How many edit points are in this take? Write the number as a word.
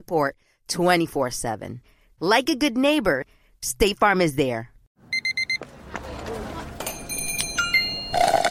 one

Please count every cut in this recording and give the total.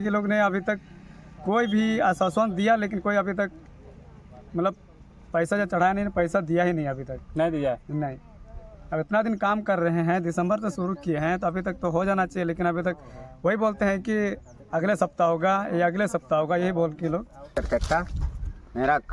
one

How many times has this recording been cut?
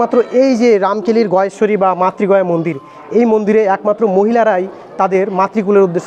zero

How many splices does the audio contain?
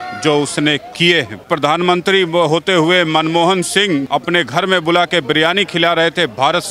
two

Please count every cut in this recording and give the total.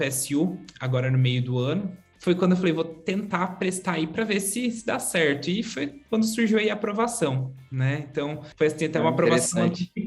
two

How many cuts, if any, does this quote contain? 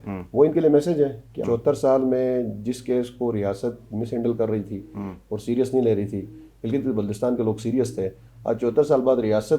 one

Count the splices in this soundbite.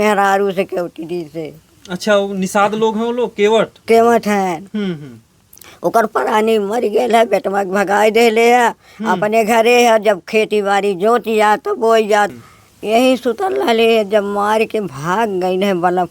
one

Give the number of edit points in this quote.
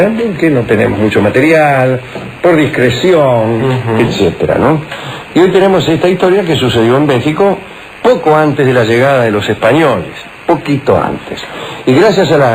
one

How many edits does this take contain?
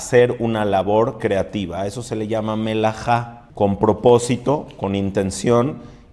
one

